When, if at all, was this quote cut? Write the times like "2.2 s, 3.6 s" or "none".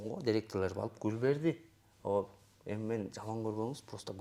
none